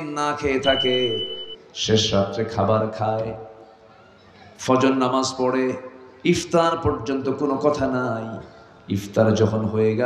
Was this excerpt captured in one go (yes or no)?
yes